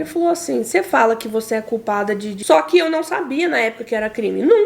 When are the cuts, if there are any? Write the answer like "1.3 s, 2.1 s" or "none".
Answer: 2.3 s